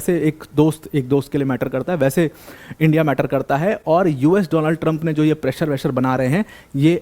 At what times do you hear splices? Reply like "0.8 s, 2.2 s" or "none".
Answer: none